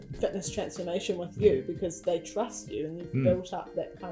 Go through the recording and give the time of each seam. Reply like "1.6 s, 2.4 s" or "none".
none